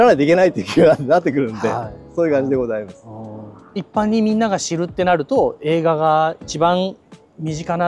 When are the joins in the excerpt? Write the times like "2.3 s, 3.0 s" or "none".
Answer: none